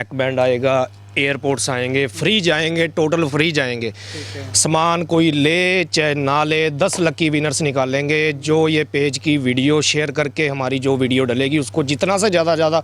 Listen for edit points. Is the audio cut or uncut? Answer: uncut